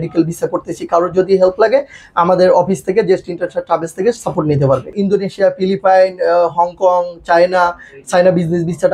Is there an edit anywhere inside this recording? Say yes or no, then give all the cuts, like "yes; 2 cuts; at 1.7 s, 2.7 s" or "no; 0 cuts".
yes; 1 cut; at 4.9 s